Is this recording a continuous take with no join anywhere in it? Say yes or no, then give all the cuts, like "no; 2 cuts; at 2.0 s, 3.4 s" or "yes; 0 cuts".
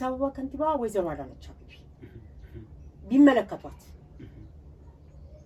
yes; 0 cuts